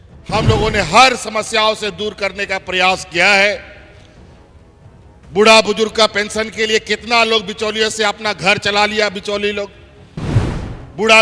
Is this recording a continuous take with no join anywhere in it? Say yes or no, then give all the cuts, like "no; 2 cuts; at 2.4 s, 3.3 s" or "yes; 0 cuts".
no; 2 cuts; at 3.8 s, 5.3 s